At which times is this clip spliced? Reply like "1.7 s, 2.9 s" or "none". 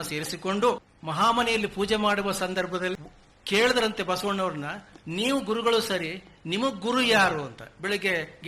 0.9 s, 2.9 s